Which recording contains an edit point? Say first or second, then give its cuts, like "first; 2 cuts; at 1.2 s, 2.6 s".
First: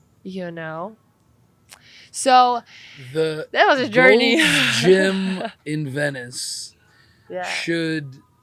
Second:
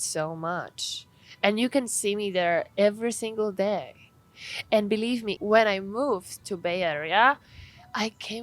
second; 1 cut; at 5.3 s